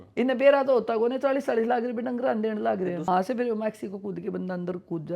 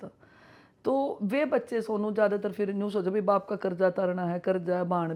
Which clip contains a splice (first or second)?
first